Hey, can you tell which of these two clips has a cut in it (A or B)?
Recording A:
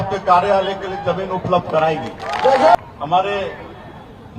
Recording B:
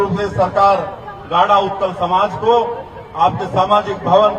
A